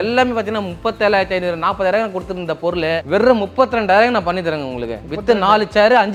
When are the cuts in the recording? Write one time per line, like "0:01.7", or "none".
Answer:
none

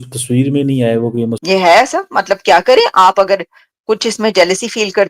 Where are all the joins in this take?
0:01.4

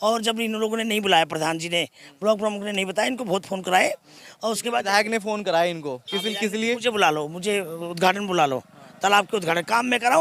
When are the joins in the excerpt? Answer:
none

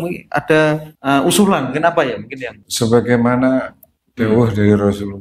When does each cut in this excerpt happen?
0:00.9
0:02.6

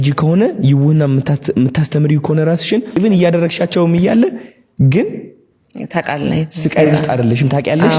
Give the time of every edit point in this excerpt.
0:02.9

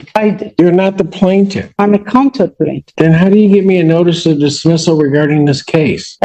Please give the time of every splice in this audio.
none

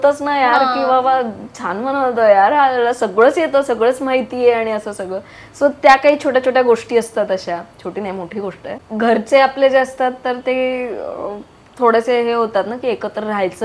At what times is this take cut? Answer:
0:08.8

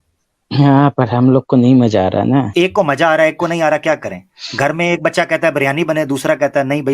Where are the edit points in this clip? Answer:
0:02.5

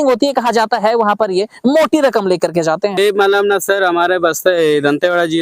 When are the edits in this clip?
0:03.0

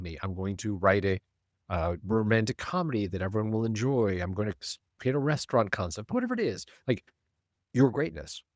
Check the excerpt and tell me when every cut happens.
none

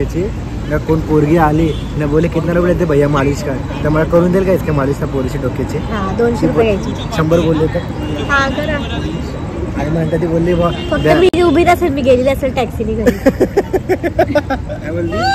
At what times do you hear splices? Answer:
none

